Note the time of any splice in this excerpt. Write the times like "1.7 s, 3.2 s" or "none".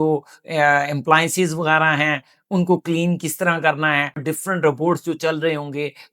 4.2 s